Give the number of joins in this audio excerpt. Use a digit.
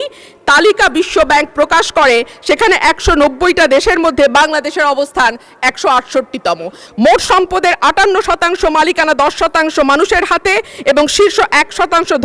1